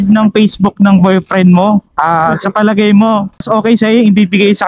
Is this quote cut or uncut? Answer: cut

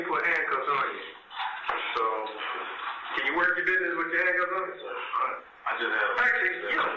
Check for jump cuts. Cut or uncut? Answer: uncut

